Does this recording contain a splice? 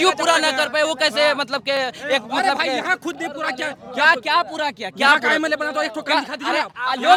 no; 0 cuts

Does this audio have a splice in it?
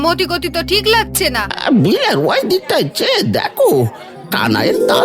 yes; 1 cut; at 1.5 s

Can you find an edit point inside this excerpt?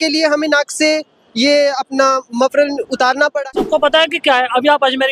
yes; 1 cut; at 3.5 s

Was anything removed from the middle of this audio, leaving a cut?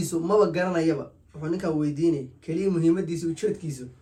no; 0 cuts

